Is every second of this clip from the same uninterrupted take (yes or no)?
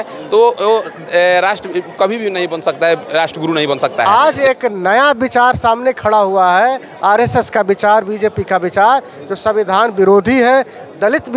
no